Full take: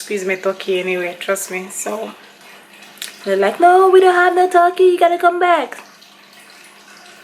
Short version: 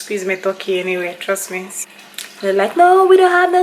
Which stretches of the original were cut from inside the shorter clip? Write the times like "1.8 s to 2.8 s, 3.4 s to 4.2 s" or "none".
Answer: 1.7 s to 2.6 s